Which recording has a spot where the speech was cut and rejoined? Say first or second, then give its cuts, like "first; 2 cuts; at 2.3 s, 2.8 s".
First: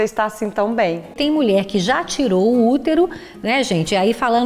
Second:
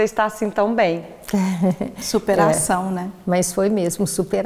first; 1 cut; at 1.2 s